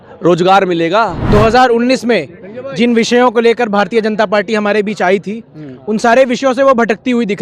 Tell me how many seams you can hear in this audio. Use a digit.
1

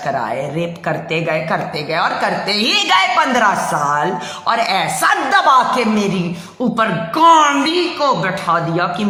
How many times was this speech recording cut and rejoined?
0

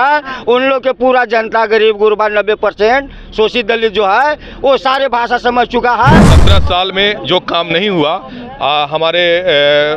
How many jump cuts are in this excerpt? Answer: 1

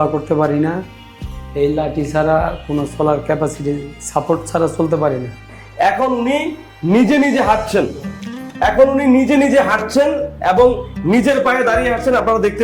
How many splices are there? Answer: 1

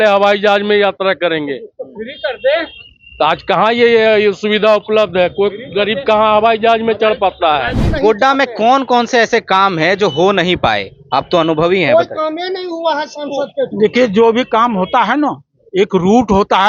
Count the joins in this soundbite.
1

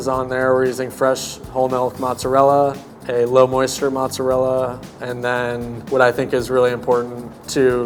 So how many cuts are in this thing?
0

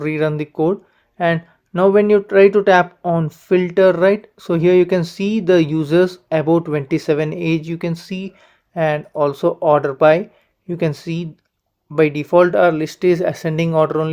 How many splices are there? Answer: 0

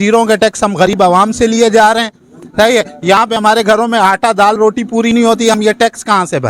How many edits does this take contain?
0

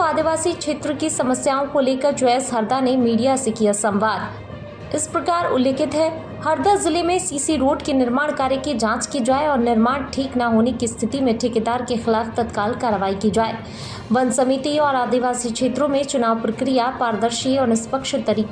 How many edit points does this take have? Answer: 0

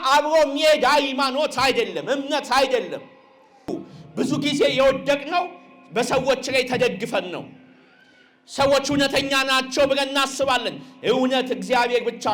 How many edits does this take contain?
1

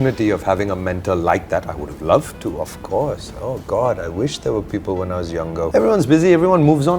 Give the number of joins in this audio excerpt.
1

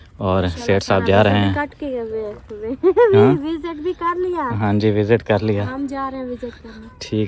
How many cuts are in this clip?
0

